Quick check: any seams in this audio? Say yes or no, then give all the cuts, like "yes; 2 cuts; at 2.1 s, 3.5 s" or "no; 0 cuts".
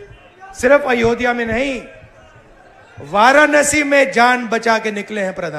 no; 0 cuts